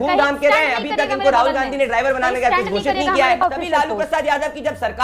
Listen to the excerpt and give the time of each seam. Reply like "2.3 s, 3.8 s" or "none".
3.4 s